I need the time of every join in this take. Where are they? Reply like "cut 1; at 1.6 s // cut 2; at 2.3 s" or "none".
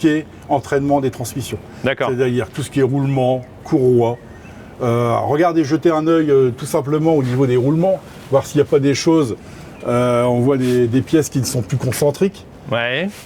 none